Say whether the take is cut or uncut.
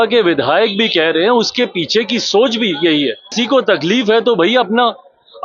cut